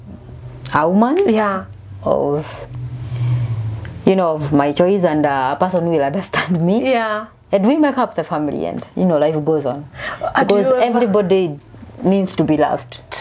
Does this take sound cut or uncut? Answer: uncut